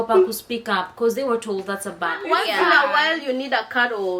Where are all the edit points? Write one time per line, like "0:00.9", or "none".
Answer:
0:02.2